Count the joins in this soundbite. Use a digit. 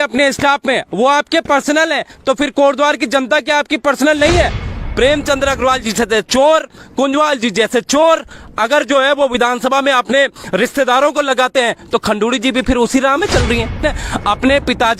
2